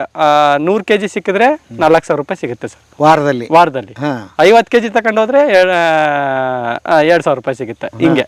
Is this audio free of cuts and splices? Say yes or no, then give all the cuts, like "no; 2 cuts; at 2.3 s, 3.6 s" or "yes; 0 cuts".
yes; 0 cuts